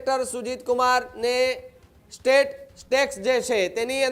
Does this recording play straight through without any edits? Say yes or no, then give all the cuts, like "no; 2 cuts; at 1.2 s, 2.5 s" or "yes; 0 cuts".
yes; 0 cuts